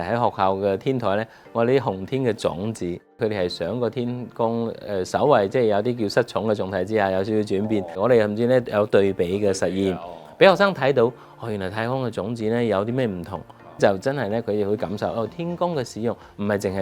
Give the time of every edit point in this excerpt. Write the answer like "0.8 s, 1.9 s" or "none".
3.2 s, 8.0 s, 13.8 s